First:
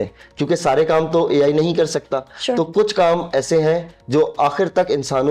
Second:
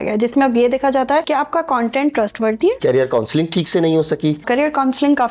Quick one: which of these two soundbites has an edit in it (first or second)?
second